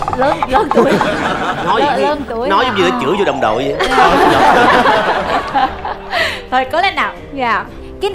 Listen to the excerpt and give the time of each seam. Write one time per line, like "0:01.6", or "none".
none